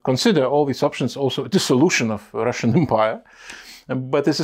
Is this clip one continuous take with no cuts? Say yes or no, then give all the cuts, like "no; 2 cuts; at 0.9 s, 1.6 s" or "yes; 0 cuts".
yes; 0 cuts